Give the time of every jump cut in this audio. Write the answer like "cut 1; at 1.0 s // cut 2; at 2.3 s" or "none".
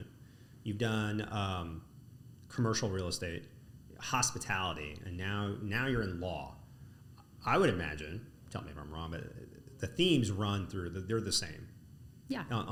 none